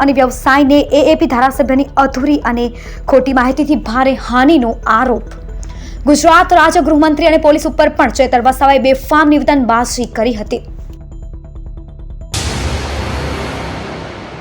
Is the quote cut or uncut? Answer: cut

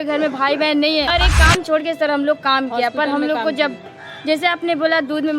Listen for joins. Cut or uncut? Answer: cut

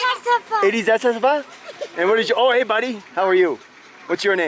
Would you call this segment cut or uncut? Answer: uncut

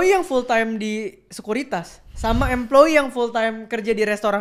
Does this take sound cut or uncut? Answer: uncut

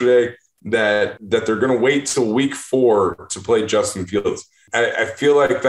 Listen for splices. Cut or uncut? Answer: cut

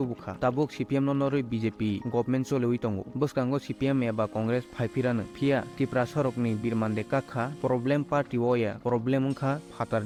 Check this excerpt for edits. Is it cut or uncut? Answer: uncut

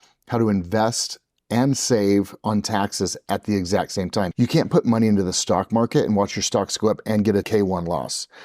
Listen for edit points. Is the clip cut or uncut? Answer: cut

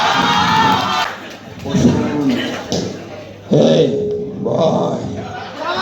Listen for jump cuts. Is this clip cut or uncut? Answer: cut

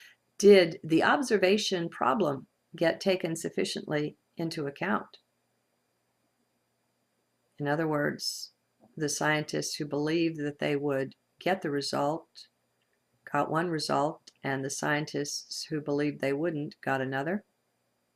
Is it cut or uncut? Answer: cut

